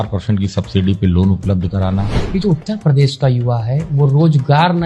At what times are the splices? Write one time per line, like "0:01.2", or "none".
0:02.2